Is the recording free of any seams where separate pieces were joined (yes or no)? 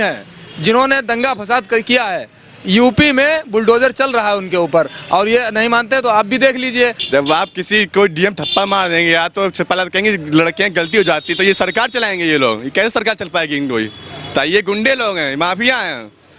no